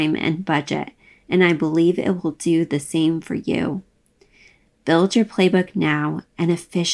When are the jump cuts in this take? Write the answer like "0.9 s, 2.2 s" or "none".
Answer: none